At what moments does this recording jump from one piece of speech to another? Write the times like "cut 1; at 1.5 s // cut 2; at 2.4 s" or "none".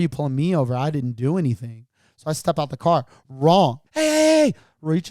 cut 1; at 3.8 s